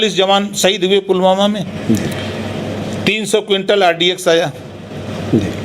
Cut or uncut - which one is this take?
uncut